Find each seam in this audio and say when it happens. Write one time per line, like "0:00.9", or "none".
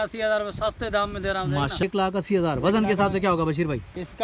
0:01.8